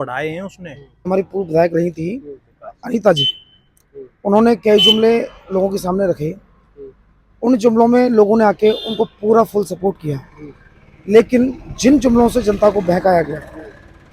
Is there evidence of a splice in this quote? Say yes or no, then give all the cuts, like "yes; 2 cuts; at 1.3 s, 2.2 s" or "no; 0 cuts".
yes; 1 cut; at 1.1 s